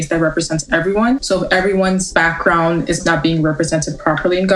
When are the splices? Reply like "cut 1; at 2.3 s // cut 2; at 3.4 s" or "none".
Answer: cut 1; at 1.2 s // cut 2; at 2.1 s // cut 3; at 3.0 s